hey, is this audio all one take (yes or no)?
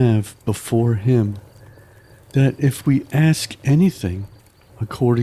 yes